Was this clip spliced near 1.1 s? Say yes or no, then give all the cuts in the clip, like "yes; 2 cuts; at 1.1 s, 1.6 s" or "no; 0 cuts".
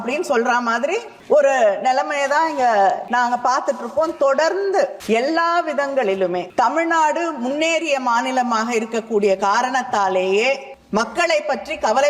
yes; 5 cuts; at 1.1 s, 3.0 s, 5.0 s, 6.5 s, 10.7 s